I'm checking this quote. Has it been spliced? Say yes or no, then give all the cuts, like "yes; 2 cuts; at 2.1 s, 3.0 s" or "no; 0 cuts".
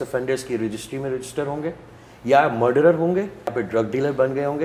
yes; 1 cut; at 3.6 s